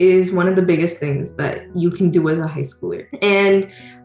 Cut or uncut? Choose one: cut